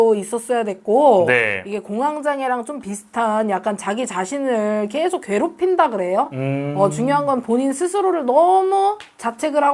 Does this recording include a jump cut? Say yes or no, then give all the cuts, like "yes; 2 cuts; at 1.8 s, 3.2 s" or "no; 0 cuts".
no; 0 cuts